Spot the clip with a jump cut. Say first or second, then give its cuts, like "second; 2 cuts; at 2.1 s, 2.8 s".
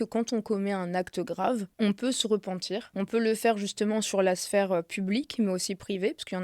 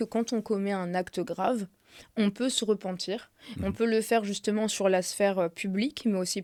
first; 2 cuts; at 1.7 s, 2.9 s